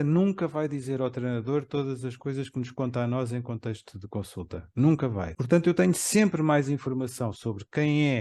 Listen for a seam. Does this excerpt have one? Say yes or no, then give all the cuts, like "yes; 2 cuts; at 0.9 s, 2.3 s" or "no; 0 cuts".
yes; 1 cut; at 5.3 s